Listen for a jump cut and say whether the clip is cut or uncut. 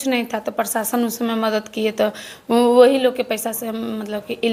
uncut